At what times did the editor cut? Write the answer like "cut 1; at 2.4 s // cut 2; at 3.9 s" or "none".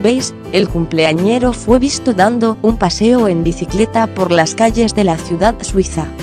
cut 1; at 1.7 s